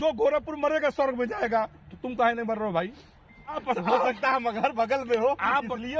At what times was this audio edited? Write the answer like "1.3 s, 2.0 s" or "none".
3.6 s